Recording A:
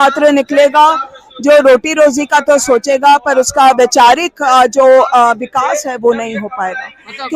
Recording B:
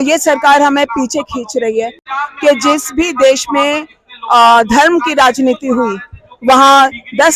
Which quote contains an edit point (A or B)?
B